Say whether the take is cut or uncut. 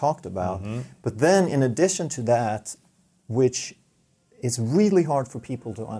uncut